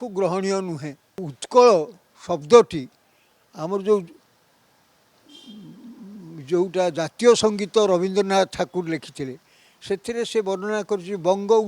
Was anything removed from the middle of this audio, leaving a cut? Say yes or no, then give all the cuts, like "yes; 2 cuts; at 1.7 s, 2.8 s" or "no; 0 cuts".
yes; 1 cut; at 1.4 s